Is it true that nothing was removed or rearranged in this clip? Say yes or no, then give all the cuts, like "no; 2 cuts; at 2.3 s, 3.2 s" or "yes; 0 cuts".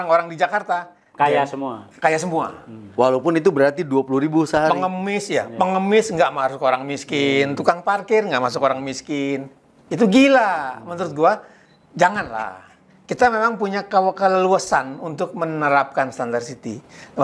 yes; 0 cuts